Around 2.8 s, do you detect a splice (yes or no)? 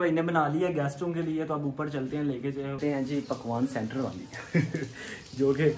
yes